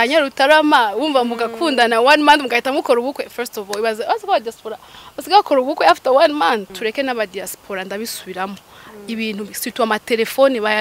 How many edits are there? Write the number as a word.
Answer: one